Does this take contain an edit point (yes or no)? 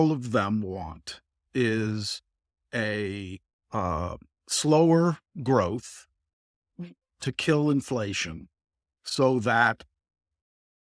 no